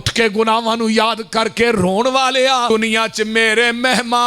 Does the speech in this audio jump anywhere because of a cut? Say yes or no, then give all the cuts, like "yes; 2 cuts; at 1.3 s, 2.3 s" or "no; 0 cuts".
yes; 1 cut; at 2.7 s